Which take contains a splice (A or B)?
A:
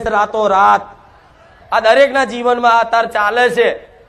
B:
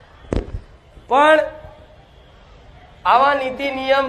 A